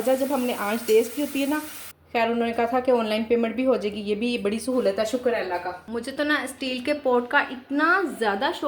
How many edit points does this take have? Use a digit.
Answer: 2